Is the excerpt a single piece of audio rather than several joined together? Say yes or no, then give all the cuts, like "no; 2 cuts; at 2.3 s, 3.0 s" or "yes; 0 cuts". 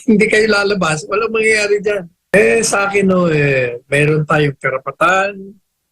no; 1 cut; at 2.3 s